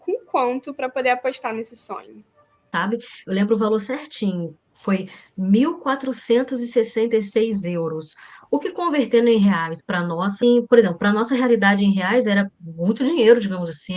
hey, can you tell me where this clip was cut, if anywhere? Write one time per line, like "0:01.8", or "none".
0:02.7
0:10.4